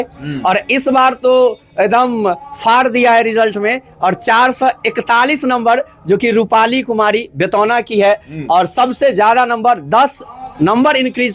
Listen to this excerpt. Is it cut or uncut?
uncut